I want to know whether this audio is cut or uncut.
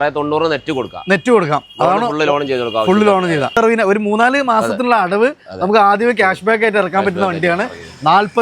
cut